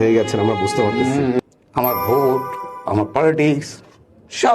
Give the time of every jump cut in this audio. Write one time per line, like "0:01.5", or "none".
0:01.4